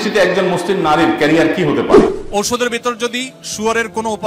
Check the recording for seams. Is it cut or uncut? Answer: cut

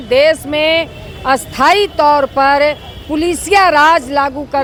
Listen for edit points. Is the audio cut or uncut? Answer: uncut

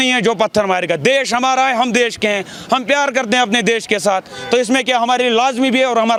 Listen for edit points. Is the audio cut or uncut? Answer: uncut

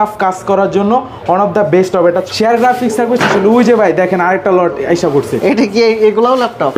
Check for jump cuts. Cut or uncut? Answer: cut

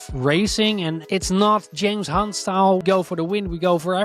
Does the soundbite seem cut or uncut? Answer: cut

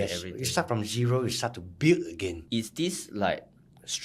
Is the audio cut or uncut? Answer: cut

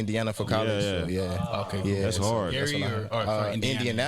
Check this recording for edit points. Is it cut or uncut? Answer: uncut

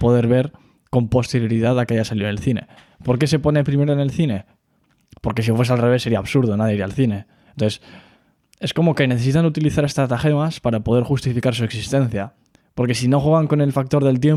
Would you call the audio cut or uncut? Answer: uncut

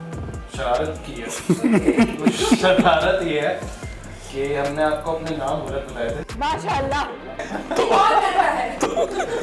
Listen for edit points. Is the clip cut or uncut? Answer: uncut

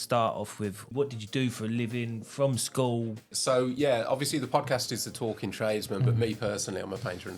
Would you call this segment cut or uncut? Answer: cut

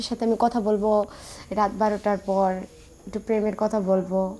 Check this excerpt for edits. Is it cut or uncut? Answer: uncut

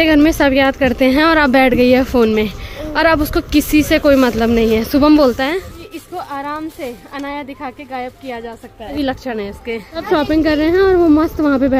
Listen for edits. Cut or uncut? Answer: uncut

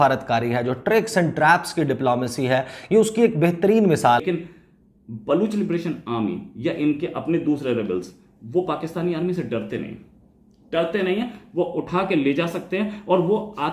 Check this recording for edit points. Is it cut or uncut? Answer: cut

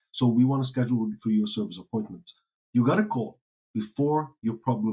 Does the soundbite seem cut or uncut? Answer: uncut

